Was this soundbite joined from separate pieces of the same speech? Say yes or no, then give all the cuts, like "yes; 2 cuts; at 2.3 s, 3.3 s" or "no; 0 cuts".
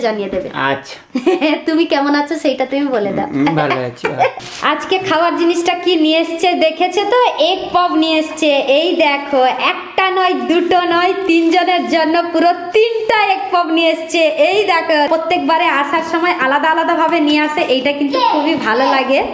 yes; 2 cuts; at 4.4 s, 15.1 s